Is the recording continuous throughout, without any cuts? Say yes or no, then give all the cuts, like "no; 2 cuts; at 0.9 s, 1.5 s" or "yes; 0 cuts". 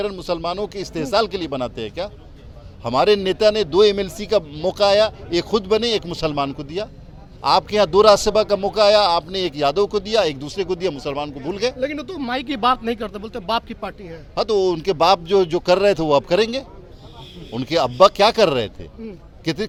yes; 0 cuts